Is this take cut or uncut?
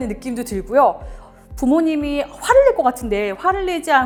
uncut